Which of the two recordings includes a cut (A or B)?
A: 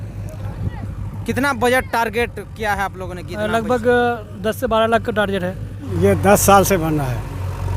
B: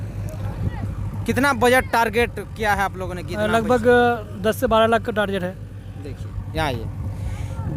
A